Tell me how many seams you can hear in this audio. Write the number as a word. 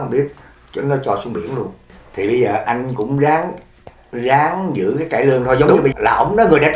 two